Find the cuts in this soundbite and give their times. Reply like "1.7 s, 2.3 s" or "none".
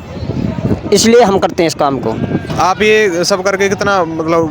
2.5 s